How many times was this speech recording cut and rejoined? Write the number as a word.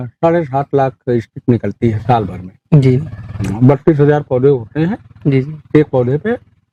zero